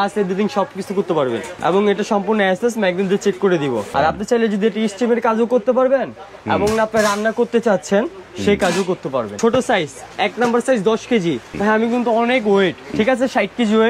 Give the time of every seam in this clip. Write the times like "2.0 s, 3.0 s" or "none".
1.5 s, 3.9 s, 9.3 s, 11.5 s, 12.9 s